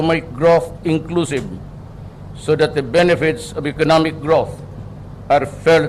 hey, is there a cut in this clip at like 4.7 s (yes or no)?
no